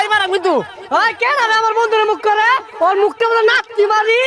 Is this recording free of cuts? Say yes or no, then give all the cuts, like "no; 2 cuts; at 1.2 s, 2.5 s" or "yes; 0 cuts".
yes; 0 cuts